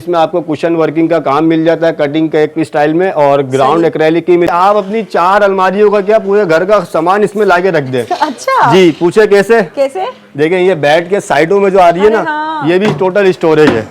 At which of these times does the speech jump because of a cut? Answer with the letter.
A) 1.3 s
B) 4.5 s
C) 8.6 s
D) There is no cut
B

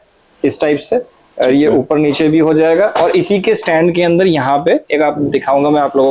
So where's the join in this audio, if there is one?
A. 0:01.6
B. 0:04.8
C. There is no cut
C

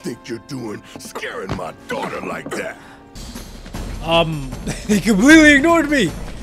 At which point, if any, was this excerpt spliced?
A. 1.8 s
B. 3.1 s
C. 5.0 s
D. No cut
B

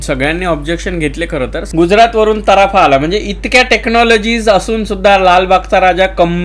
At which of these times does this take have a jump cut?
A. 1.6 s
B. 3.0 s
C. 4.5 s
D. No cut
A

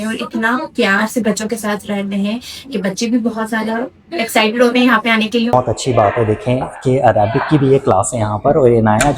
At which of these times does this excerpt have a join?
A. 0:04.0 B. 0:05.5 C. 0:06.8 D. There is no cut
B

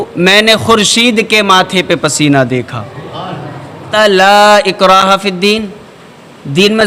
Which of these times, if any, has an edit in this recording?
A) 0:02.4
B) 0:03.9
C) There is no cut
B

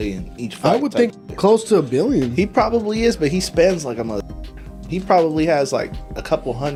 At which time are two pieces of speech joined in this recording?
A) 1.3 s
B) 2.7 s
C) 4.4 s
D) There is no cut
D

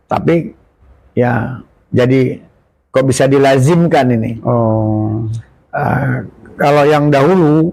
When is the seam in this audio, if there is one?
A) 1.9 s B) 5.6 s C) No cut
C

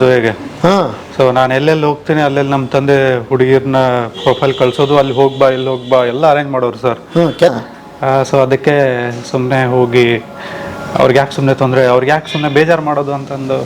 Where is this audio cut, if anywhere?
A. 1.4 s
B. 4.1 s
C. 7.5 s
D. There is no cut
C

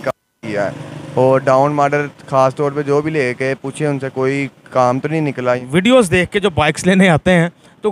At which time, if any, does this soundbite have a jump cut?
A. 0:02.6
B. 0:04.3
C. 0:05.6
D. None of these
C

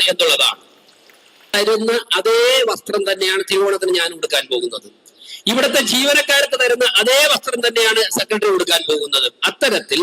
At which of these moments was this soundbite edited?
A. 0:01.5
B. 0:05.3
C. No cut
A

